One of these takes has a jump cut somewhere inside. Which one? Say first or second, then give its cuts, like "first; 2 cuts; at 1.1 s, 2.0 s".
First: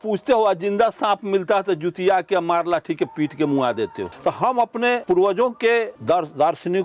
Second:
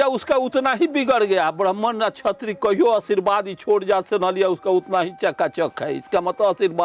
first; 3 cuts; at 4.1 s, 5.0 s, 5.9 s